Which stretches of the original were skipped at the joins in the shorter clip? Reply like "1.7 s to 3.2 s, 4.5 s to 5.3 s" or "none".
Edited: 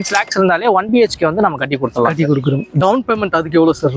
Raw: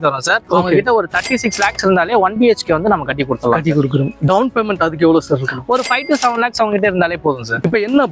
none